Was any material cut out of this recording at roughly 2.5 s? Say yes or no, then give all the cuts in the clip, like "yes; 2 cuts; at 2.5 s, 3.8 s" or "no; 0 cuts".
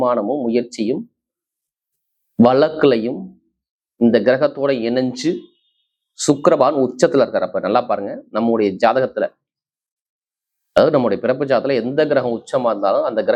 no; 0 cuts